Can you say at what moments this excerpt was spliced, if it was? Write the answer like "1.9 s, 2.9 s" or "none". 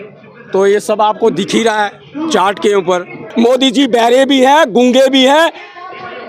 3.2 s